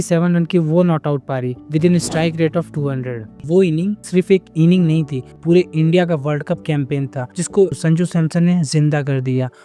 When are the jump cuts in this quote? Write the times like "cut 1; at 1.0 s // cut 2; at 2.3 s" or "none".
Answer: cut 1; at 5.4 s